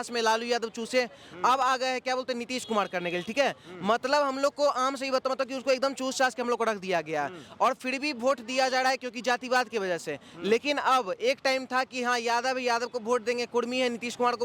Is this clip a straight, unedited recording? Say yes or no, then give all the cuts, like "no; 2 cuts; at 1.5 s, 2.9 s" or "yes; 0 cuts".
yes; 0 cuts